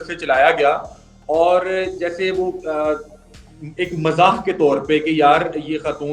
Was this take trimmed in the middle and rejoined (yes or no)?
no